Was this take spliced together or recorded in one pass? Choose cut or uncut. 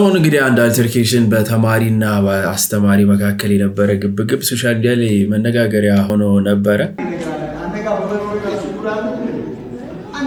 uncut